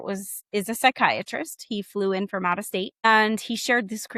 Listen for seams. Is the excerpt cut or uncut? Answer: uncut